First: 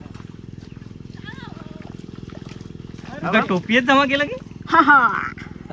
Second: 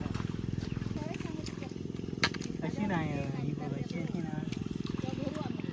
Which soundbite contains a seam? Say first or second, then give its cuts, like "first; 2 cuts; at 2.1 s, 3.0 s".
second; 1 cut; at 1.0 s